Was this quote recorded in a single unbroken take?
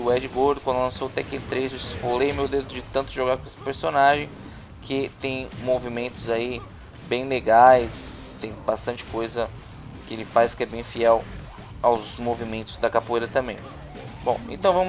no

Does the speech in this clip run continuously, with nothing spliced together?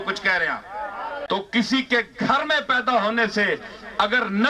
no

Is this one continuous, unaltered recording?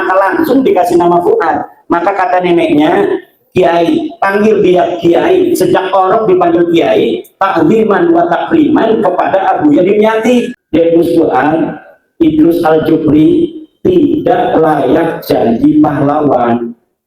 no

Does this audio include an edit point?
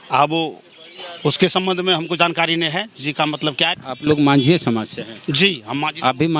yes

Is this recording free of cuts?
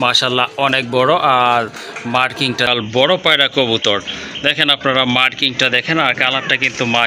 no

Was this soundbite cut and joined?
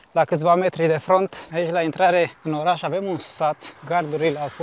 yes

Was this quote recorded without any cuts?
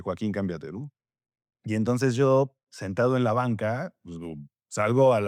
yes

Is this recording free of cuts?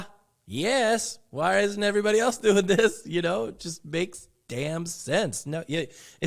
yes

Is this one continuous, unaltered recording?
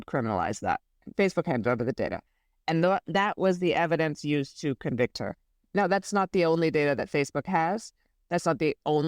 no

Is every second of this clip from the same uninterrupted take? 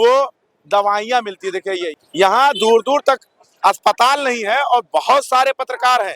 yes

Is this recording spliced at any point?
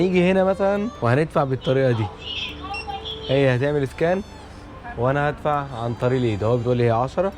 yes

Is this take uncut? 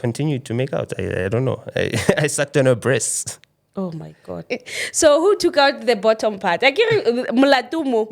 no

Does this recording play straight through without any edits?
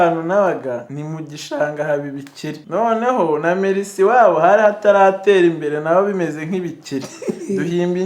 no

